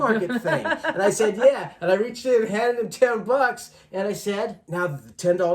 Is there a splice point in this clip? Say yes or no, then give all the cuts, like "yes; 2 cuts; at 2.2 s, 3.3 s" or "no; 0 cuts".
yes; 1 cut; at 4.6 s